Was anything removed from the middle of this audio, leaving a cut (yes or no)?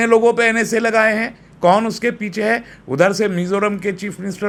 no